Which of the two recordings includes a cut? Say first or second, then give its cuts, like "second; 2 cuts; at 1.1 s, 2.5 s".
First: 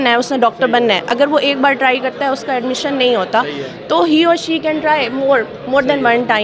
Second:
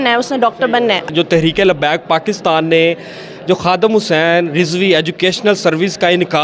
second; 1 cut; at 1.1 s